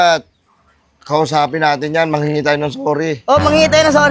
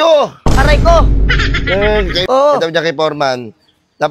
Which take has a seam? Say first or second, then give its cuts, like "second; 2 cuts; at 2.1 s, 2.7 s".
second; 1 cut; at 2.2 s